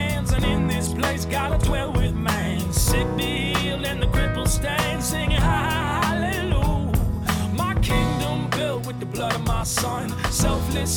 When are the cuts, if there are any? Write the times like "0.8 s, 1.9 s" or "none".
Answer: none